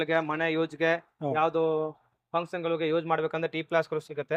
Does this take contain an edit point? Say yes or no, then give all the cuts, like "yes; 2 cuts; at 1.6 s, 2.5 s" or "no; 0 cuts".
no; 0 cuts